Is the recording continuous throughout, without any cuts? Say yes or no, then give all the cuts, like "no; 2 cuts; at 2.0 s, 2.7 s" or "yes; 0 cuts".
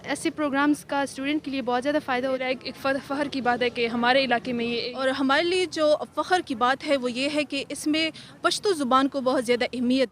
no; 2 cuts; at 2.4 s, 4.9 s